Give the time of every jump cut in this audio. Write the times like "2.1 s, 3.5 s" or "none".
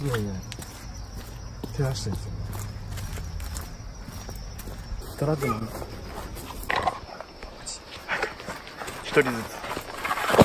5.0 s, 6.6 s